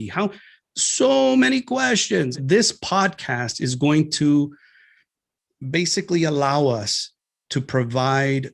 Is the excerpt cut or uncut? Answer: cut